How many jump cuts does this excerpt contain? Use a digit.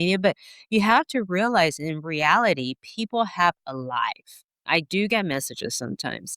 1